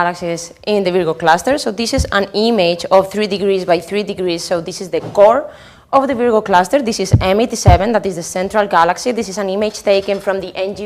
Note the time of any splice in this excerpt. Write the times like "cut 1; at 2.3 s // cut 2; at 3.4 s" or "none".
none